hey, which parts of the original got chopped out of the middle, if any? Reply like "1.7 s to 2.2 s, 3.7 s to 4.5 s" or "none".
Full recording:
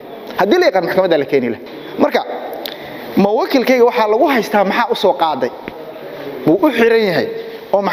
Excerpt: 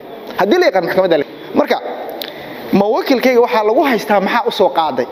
1.3 s to 1.7 s